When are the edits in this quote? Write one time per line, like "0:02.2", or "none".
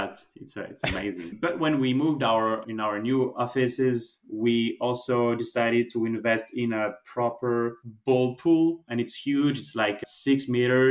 0:01.3

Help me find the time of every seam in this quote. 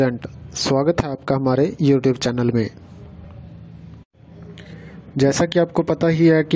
0:03.2

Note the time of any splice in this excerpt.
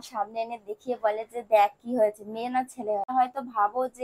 0:03.1

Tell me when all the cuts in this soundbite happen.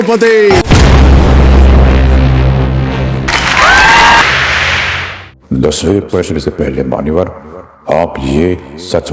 0:04.2

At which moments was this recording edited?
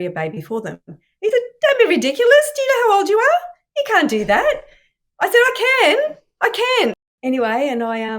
0:07.0

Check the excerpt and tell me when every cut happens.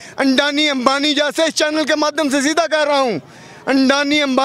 none

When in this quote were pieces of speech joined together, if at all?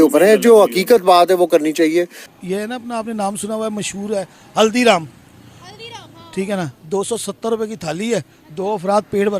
0:02.2

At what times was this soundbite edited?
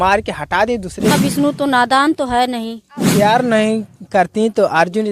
0:01.1
0:03.1

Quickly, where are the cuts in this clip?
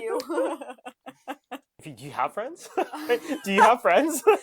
0:01.8

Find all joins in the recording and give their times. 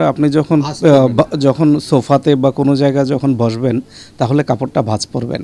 none

